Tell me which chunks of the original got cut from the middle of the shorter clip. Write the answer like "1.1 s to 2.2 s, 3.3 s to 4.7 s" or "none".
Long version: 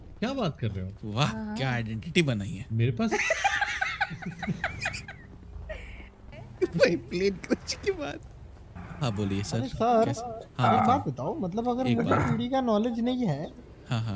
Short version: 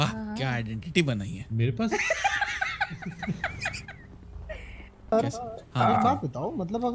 6.3 s to 10.0 s